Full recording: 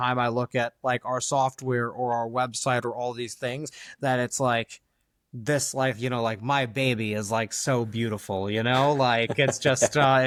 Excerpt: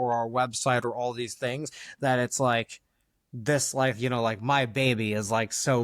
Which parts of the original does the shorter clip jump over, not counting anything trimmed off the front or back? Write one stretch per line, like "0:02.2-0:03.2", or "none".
none